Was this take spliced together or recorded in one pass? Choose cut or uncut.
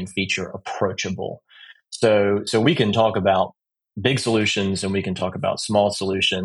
uncut